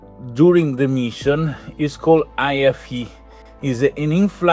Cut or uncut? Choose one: uncut